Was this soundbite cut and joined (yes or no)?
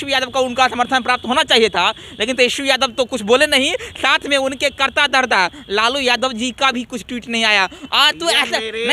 no